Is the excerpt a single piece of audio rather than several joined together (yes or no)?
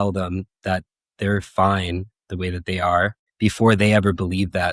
no